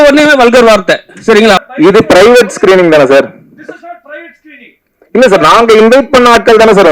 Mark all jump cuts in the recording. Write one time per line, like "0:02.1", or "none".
0:01.6